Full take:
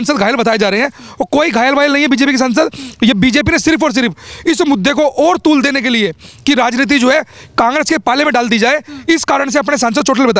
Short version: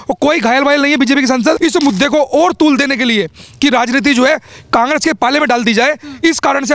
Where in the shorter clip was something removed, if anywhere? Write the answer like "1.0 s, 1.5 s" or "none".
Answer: 1.6 s